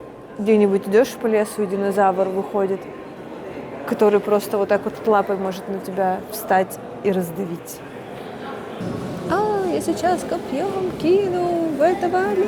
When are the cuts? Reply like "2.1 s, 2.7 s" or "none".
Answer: 8.8 s